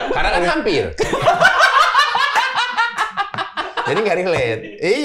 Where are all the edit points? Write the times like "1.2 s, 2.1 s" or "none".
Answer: none